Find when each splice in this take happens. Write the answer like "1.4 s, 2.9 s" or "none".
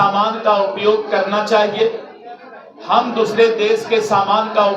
none